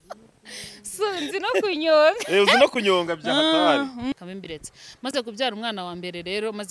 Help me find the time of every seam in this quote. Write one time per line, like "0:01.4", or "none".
0:04.1